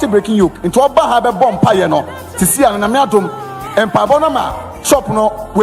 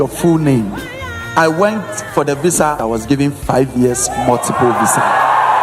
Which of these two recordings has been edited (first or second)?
second